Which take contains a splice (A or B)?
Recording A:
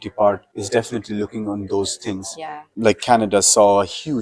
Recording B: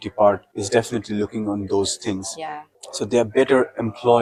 A